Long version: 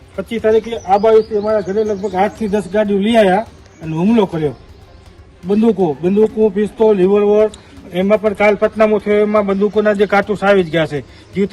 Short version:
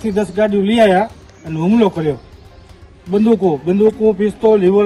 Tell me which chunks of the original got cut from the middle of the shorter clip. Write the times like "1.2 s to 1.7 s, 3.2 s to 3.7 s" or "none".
none